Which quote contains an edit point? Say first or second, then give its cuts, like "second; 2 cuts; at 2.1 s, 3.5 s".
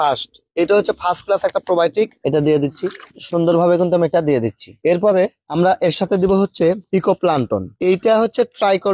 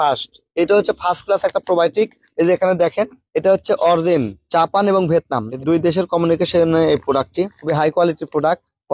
first; 1 cut; at 2.2 s